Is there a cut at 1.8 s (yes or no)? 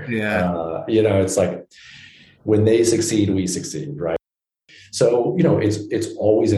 no